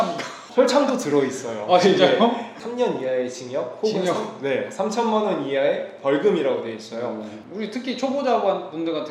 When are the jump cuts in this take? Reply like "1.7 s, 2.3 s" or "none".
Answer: 2.6 s, 7.3 s